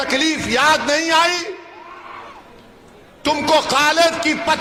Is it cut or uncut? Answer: uncut